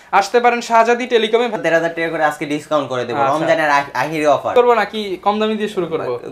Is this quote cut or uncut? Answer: cut